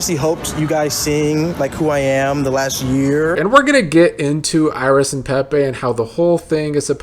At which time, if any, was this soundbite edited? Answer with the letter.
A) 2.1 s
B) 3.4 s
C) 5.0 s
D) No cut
B